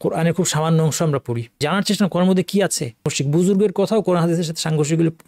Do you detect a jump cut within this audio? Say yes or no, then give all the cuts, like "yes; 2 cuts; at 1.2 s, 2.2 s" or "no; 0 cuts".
yes; 2 cuts; at 1.6 s, 3.2 s